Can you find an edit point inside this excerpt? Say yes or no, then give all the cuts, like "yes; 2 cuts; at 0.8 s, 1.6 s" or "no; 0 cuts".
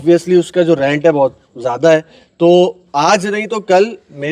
no; 0 cuts